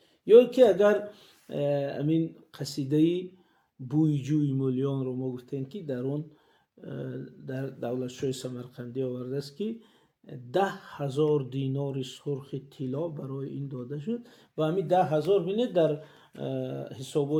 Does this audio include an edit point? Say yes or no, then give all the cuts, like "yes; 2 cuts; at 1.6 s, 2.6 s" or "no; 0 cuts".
no; 0 cuts